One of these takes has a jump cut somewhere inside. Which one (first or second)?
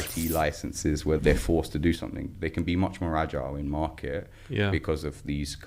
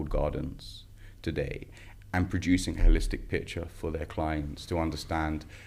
first